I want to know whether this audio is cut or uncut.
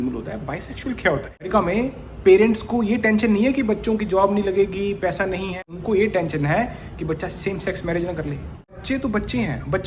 cut